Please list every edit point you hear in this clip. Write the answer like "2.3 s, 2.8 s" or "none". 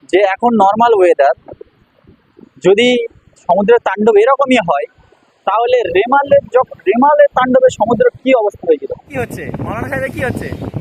9.0 s